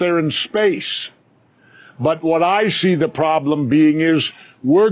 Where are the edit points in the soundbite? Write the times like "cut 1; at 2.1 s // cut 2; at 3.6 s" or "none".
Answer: cut 1; at 3.7 s